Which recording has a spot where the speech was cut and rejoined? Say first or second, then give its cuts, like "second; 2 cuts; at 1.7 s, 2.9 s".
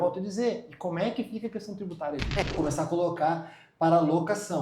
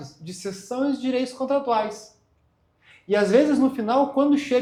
first; 1 cut; at 2.4 s